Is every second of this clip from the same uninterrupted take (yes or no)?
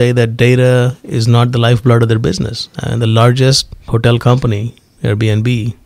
no